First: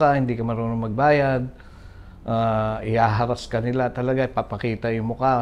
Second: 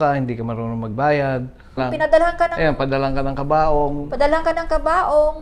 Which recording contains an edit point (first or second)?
second